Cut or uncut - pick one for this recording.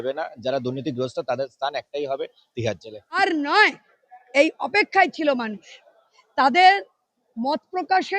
cut